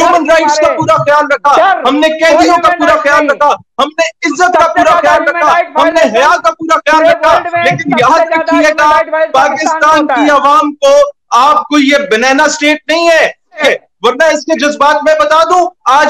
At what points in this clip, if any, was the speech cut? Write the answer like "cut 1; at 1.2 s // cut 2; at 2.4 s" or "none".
cut 1; at 13.6 s